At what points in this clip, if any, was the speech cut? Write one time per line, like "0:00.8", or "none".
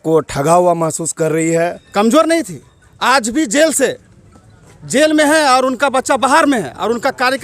0:01.8